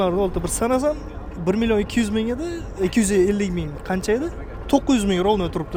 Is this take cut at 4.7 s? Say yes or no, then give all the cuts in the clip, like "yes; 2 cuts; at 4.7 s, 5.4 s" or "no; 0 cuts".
no; 0 cuts